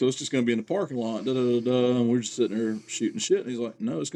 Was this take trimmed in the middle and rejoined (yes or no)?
no